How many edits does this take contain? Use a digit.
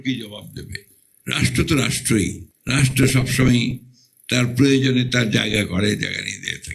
1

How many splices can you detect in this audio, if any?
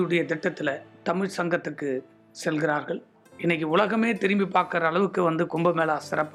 0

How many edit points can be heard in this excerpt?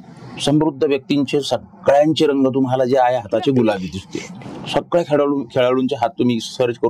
1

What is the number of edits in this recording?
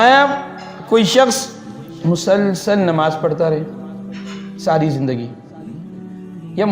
0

